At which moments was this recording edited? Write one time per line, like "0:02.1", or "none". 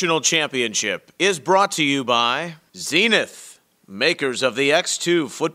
0:02.5